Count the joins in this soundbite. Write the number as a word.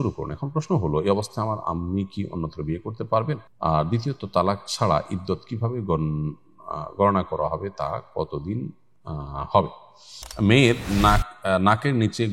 two